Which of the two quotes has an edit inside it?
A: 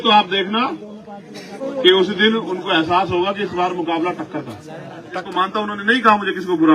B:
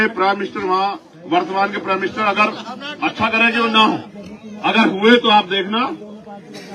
A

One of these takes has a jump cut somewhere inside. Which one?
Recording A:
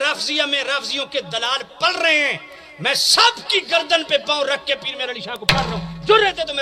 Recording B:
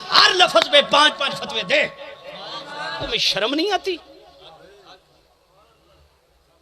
B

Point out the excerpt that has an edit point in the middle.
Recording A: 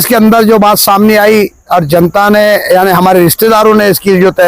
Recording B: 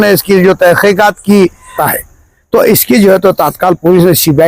B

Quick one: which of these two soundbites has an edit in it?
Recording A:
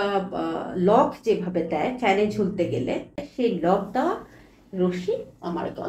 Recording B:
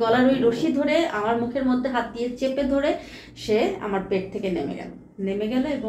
A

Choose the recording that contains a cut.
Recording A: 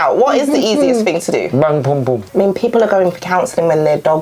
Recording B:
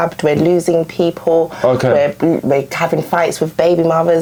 A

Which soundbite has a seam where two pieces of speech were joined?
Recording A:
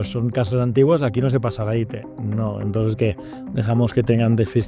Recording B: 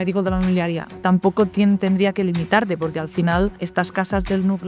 B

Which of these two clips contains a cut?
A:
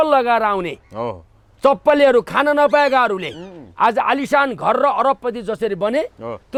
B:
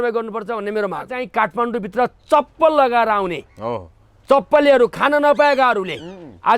B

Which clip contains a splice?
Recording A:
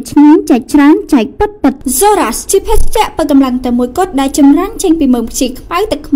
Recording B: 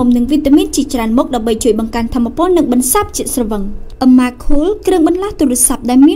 A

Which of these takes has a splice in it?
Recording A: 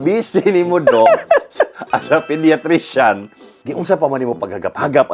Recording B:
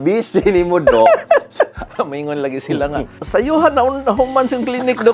B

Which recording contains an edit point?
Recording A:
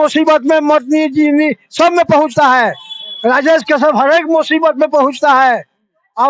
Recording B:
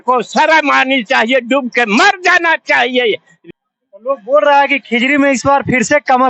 B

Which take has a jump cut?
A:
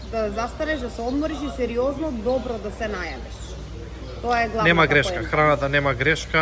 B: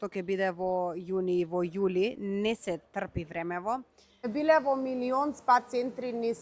B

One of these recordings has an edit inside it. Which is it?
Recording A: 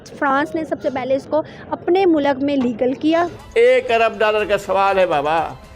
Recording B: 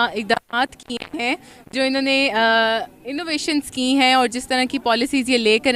A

